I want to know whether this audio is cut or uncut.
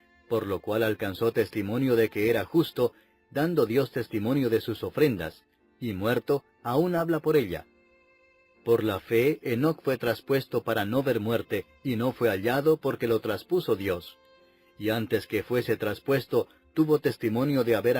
cut